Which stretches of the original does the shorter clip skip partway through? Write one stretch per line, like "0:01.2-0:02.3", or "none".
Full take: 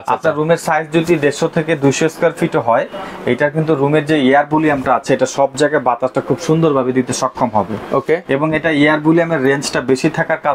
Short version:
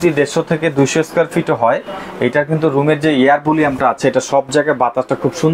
none